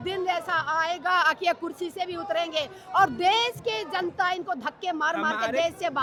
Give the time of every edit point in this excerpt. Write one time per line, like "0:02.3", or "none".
none